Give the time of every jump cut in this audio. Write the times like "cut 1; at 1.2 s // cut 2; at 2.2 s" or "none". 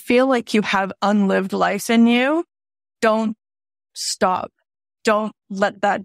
none